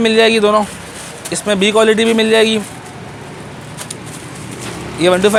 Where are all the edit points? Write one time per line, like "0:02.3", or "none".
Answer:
none